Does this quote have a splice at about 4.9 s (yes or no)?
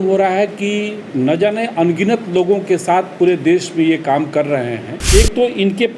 yes